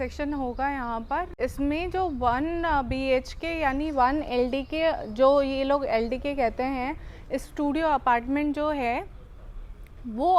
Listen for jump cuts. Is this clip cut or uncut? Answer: cut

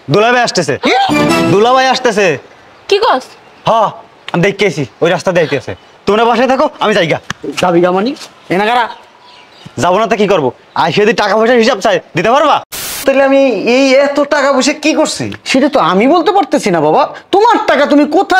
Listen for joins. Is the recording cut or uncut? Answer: cut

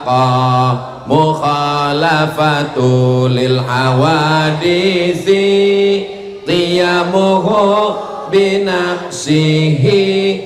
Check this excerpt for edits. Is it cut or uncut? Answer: uncut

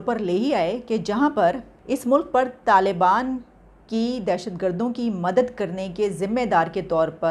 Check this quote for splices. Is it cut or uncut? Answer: cut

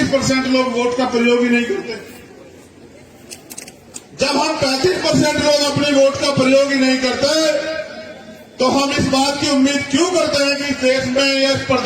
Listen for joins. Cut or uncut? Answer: uncut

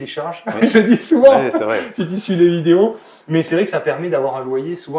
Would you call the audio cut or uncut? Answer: uncut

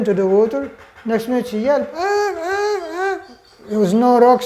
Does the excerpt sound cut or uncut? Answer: uncut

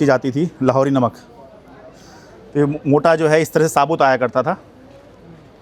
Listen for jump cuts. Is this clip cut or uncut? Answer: uncut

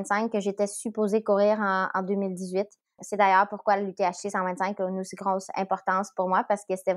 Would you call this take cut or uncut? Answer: cut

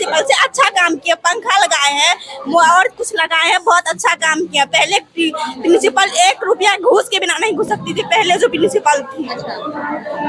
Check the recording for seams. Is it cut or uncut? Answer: uncut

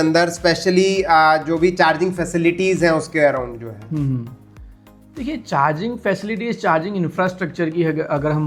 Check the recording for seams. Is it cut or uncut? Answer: uncut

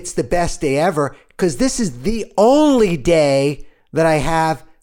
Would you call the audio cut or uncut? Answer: uncut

